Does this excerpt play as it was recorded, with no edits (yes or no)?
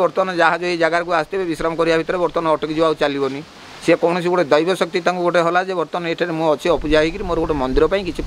yes